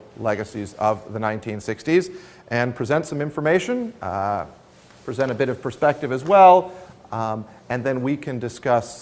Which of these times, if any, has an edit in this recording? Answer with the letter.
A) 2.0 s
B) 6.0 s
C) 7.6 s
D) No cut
B